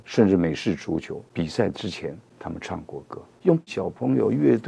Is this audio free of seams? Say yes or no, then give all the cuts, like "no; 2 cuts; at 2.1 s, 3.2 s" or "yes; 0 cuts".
no; 3 cuts; at 1.2 s, 2.3 s, 3.3 s